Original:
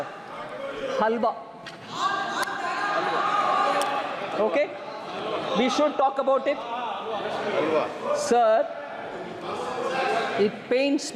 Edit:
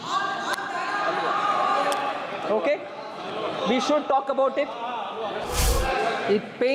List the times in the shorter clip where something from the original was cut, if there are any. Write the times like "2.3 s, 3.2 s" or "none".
5.4 s